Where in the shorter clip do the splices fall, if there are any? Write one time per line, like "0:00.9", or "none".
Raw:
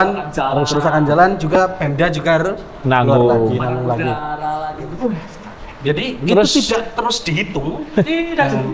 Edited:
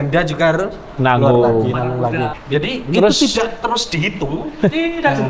0:02.4